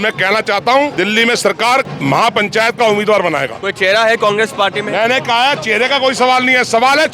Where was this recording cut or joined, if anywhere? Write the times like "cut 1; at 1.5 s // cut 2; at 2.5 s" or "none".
none